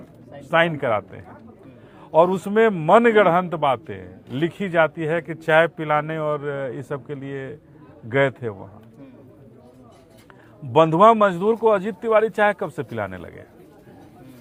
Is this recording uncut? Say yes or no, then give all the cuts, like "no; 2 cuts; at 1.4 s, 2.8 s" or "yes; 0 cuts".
yes; 0 cuts